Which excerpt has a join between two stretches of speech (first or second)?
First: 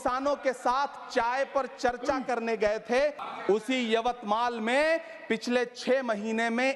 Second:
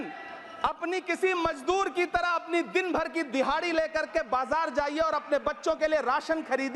first